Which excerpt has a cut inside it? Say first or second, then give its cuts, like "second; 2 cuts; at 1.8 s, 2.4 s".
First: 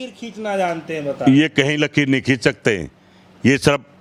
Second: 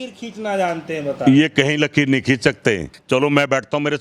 second; 1 cut; at 2.9 s